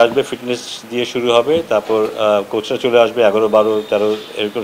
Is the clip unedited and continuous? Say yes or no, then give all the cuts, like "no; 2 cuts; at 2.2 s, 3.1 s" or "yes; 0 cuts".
yes; 0 cuts